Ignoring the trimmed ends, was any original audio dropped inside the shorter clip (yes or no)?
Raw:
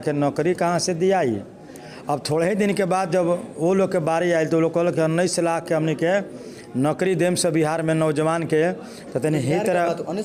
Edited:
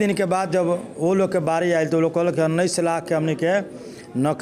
no